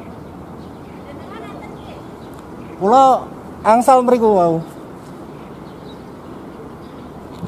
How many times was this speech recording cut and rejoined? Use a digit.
0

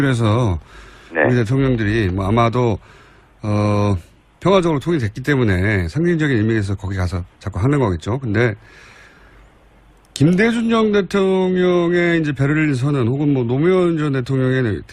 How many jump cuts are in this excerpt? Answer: 1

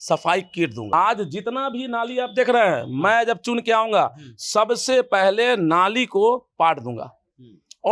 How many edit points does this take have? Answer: 1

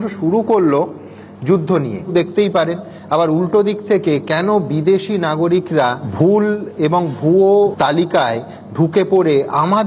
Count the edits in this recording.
3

